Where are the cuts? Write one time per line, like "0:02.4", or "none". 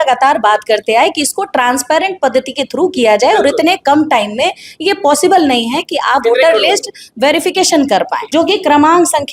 0:08.2